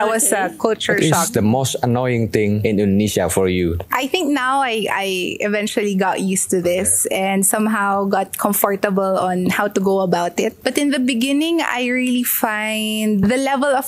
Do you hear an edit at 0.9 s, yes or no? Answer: yes